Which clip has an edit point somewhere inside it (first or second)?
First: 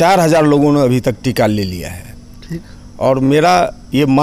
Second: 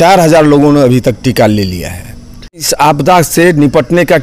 second